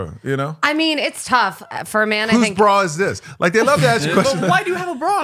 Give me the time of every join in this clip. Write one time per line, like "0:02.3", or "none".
none